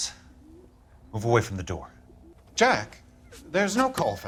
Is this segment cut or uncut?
uncut